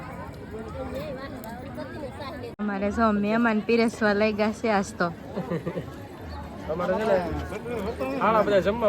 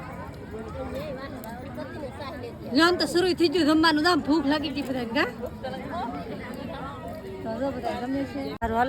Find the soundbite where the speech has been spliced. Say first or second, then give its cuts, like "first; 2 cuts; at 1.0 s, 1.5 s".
first; 1 cut; at 2.6 s